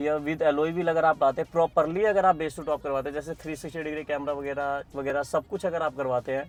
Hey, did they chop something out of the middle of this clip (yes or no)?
no